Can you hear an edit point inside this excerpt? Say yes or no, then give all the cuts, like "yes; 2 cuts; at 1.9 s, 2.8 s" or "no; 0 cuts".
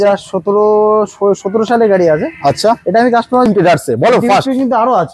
yes; 1 cut; at 3.5 s